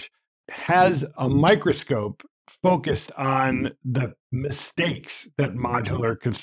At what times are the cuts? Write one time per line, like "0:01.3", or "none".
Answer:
0:01.1